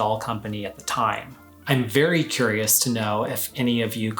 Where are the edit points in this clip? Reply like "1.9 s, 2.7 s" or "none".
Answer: 1.6 s